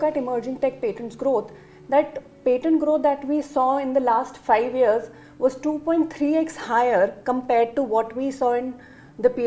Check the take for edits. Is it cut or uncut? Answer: uncut